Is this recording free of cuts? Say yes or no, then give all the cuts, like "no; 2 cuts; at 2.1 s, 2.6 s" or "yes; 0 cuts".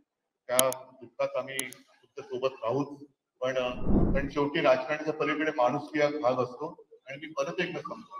no; 1 cut; at 3.9 s